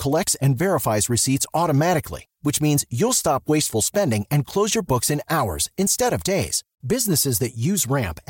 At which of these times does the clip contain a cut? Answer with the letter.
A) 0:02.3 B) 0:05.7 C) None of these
C